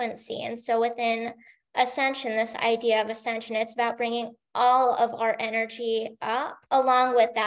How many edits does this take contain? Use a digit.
1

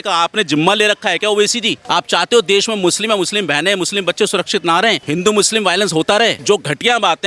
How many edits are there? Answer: 3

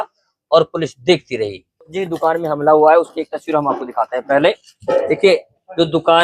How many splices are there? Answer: 1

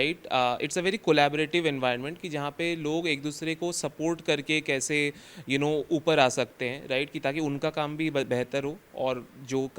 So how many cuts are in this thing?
0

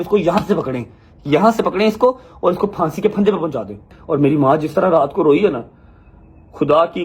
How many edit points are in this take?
1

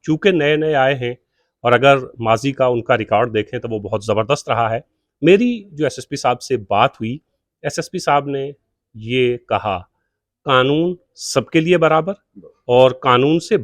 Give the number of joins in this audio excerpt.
0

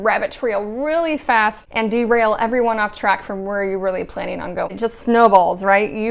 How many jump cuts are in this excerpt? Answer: 2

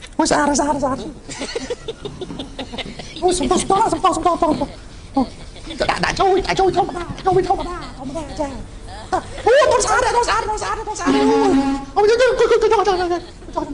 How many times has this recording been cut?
0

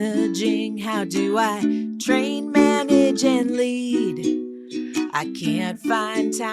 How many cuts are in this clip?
0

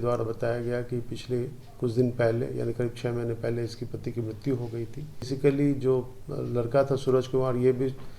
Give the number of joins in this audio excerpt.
1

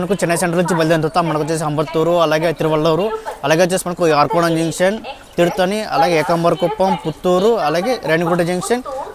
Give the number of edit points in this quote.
0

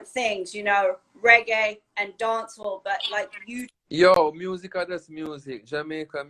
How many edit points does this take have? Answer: 1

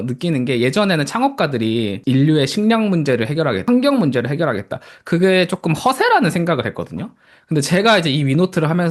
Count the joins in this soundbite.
2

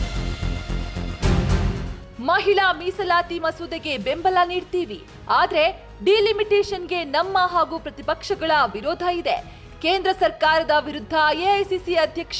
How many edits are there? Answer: 2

